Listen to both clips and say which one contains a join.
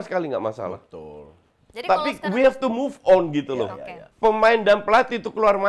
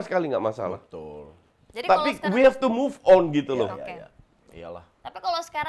first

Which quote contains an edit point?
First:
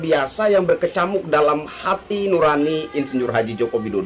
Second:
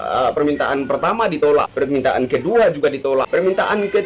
second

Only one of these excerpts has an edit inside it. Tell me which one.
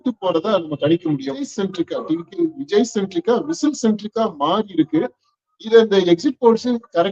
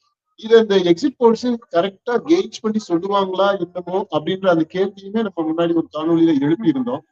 first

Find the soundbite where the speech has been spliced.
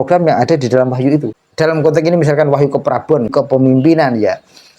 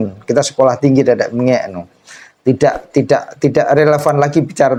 first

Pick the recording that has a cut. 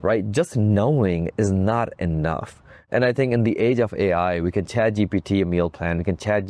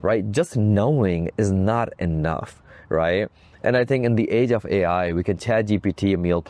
first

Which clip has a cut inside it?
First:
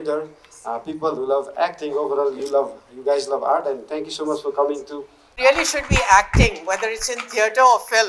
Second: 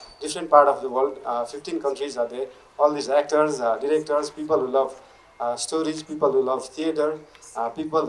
first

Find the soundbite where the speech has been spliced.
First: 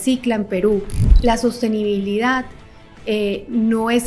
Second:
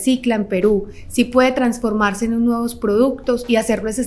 first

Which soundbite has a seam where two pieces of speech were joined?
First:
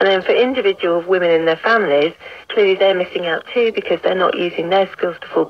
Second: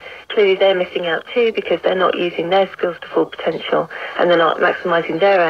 second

